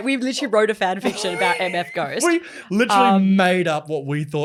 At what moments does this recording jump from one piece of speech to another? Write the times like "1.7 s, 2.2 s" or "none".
none